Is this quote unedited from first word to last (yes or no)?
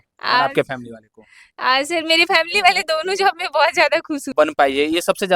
no